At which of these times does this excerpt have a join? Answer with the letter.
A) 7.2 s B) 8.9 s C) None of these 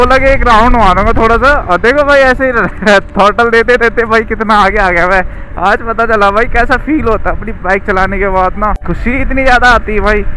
B